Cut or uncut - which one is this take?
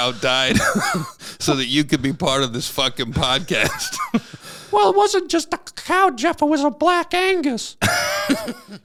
uncut